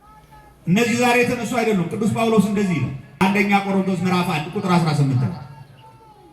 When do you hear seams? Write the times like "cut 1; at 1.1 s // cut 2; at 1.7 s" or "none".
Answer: cut 1; at 3.1 s